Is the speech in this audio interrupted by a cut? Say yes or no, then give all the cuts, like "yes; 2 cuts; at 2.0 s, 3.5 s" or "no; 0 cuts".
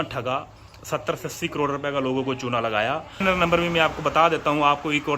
yes; 1 cut; at 3.2 s